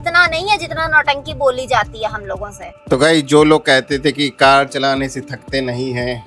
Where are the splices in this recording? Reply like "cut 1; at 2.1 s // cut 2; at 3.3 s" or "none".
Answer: cut 1; at 2.8 s

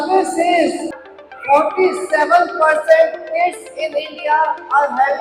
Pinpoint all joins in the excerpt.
cut 1; at 0.9 s

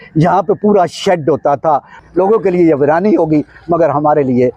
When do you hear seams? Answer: cut 1; at 1.9 s

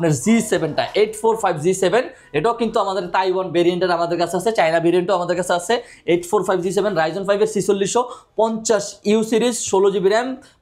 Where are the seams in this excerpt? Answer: none

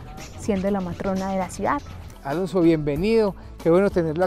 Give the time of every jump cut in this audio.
cut 1; at 2.1 s

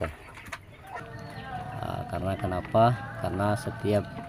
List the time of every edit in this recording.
cut 1; at 1.0 s

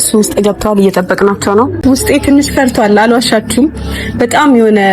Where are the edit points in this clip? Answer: cut 1; at 1.8 s

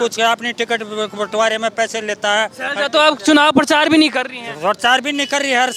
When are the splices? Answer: none

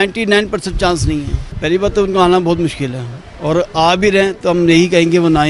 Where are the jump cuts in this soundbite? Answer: cut 1; at 1.4 s

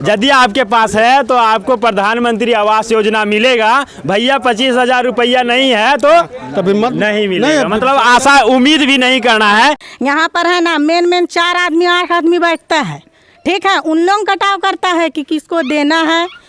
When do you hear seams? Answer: cut 1; at 9.8 s

